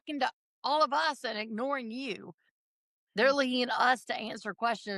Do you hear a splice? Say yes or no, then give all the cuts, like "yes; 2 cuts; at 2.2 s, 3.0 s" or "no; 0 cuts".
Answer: no; 0 cuts